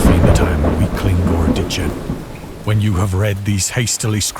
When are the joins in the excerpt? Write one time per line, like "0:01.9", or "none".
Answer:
0:02.4